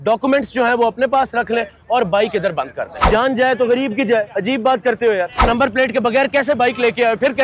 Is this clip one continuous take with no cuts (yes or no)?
no